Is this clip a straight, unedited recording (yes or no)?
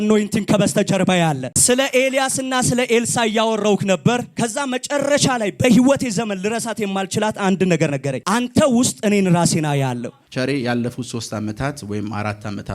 no